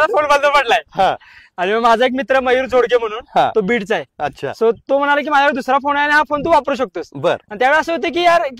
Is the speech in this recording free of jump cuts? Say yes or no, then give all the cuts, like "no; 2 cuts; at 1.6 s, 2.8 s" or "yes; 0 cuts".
yes; 0 cuts